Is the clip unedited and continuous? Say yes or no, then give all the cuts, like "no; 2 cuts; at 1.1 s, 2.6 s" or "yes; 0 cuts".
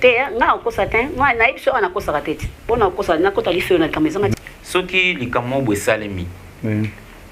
no; 1 cut; at 4.3 s